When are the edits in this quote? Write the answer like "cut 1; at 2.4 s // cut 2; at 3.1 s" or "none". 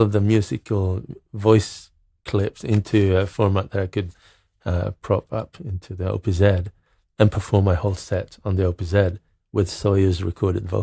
none